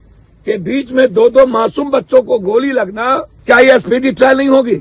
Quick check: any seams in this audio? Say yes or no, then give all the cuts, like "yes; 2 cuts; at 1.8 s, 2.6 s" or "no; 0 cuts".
yes; 1 cut; at 3.3 s